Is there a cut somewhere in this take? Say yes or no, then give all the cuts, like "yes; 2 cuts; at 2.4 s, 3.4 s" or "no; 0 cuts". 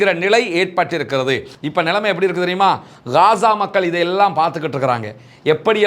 yes; 1 cut; at 1.5 s